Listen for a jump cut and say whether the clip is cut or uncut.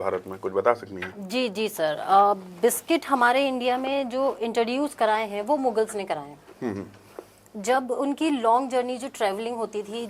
uncut